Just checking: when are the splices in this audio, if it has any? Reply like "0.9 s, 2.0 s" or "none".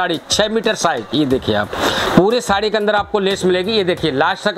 2.0 s